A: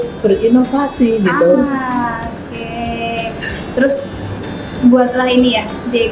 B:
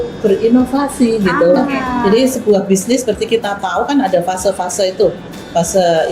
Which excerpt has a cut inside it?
B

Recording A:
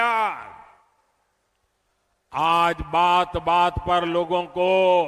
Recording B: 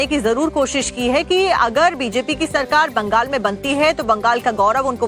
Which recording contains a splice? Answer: B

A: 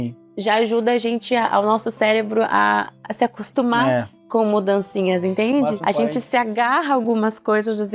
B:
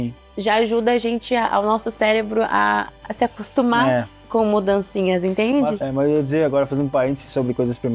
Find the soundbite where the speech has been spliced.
B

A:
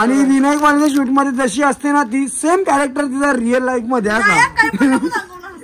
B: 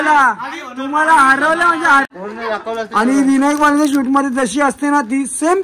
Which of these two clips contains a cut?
B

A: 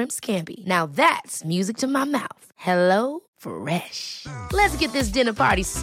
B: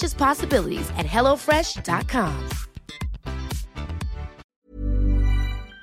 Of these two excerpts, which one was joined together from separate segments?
B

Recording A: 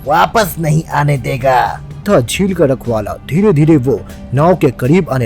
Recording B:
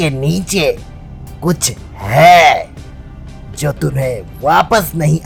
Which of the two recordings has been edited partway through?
A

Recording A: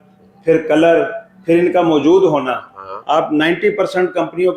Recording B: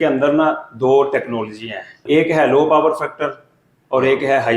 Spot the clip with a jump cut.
B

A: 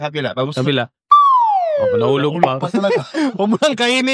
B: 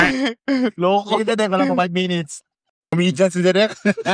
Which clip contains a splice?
B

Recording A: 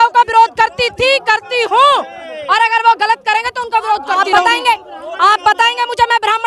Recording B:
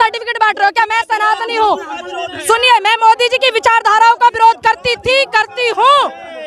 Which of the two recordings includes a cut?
A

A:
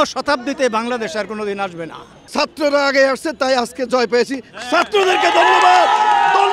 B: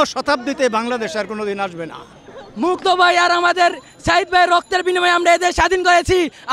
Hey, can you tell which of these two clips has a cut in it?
A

